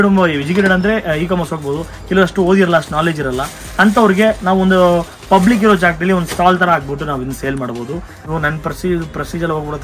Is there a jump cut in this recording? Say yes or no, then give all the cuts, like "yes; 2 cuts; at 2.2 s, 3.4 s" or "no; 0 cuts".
yes; 1 cut; at 8.2 s